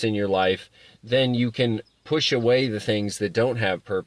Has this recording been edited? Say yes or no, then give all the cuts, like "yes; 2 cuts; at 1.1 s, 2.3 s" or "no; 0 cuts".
no; 0 cuts